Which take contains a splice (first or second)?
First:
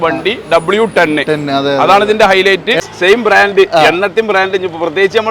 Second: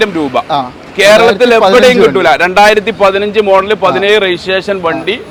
first